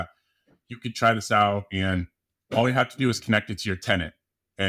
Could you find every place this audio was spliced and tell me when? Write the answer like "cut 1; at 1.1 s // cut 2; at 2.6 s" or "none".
none